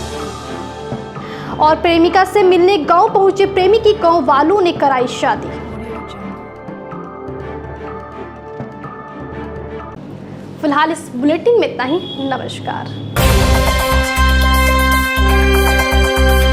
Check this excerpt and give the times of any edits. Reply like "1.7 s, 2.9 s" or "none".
none